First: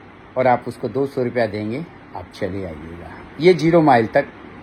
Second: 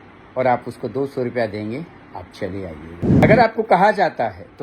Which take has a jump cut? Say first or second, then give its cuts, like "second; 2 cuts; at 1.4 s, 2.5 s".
second; 1 cut; at 3.2 s